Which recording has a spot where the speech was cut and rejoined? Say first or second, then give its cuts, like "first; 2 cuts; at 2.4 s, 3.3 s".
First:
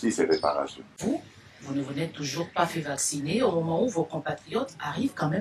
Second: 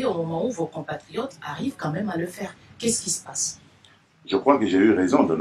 first; 1 cut; at 1.0 s